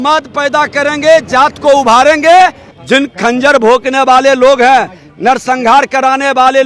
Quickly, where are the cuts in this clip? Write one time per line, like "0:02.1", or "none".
0:02.7